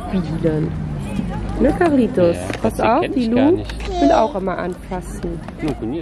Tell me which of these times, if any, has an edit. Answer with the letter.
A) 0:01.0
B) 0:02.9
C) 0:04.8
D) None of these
D